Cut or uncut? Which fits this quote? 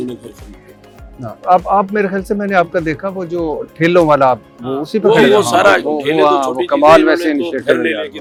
uncut